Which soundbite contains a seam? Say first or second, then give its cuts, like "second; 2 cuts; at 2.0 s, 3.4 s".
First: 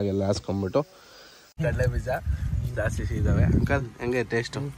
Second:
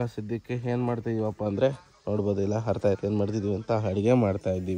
first; 1 cut; at 1.4 s